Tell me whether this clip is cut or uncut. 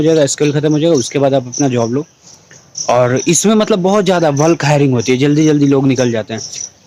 uncut